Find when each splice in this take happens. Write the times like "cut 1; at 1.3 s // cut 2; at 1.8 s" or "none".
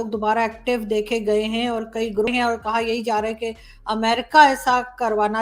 cut 1; at 2.3 s